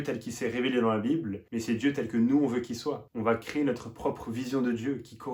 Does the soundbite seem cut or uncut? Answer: uncut